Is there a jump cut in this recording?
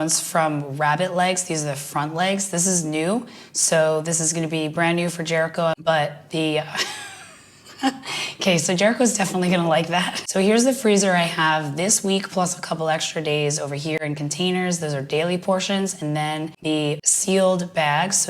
yes; 3 cuts; at 5.8 s, 10.2 s, 16.8 s

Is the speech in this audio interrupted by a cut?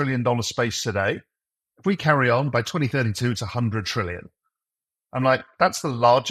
no; 0 cuts

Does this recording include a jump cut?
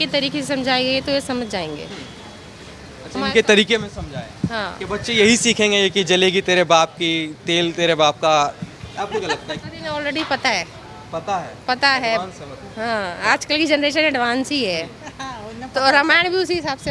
yes; 1 cut; at 9.6 s

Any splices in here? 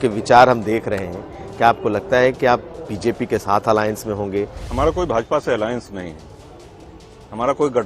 yes; 1 cut; at 4.6 s

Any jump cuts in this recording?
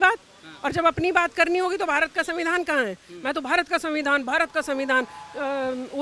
no; 0 cuts

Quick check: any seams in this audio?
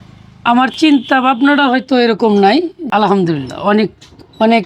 yes; 1 cut; at 2.9 s

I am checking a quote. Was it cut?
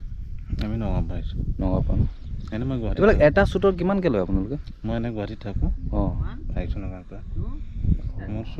no; 0 cuts

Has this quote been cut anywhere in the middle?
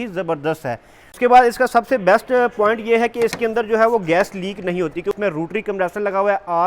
yes; 2 cuts; at 1.2 s, 5.1 s

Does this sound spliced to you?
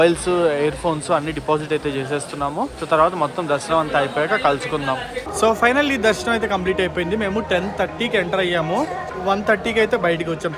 no; 0 cuts

